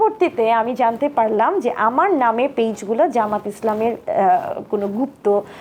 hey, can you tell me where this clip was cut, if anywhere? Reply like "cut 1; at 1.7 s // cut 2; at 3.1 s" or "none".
none